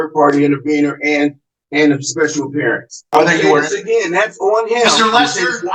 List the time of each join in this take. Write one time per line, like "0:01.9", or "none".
0:03.1